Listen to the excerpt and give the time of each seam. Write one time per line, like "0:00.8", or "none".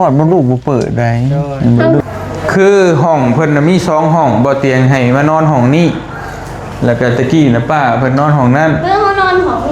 0:02.0

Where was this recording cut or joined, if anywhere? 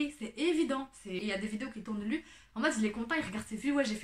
0:01.2

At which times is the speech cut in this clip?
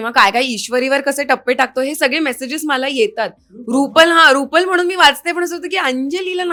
none

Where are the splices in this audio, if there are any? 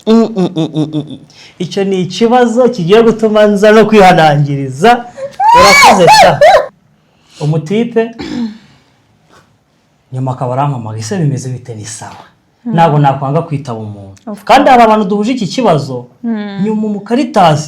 0:06.7

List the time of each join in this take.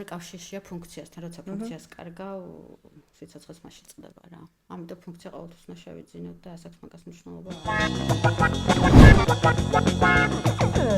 0:07.6

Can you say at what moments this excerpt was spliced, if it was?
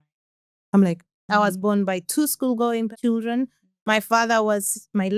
0:01.2
0:02.9

